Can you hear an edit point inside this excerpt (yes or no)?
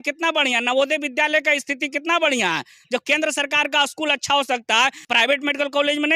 yes